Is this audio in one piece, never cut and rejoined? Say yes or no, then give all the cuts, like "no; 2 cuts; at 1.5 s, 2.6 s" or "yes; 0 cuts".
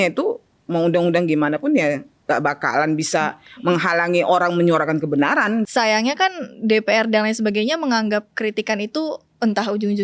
no; 1 cut; at 5.7 s